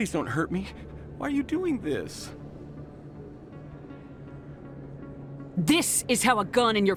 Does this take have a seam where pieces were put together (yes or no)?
no